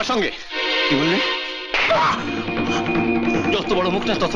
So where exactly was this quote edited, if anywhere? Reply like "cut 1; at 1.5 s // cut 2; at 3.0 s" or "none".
none